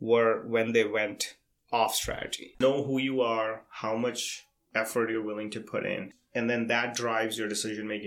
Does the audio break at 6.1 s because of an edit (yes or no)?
yes